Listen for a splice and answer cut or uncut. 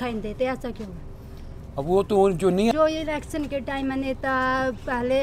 cut